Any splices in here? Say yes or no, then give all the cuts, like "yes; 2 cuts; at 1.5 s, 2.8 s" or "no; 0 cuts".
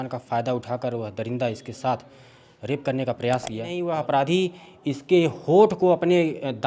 yes; 1 cut; at 3.8 s